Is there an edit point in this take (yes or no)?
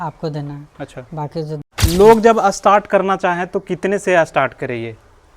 yes